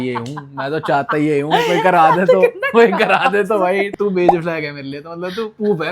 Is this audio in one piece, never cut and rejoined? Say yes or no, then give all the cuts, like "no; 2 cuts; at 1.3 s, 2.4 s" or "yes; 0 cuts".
no; 1 cut; at 3.9 s